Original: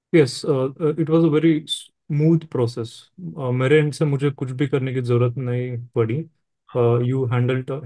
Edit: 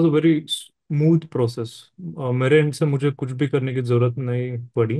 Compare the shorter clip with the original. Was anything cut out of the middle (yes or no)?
no